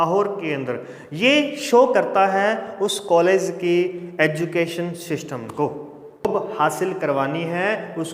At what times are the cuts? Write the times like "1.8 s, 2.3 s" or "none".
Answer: 6.2 s